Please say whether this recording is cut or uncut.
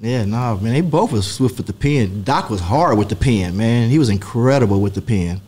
uncut